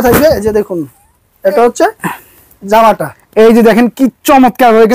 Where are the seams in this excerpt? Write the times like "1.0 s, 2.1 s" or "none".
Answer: none